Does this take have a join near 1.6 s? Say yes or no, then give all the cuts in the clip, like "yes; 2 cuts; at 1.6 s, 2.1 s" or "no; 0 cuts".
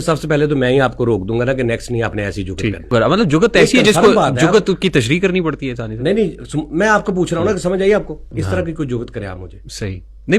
no; 2 cuts; at 2.9 s, 8.3 s